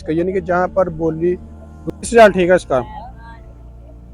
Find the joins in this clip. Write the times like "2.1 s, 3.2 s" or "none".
2.1 s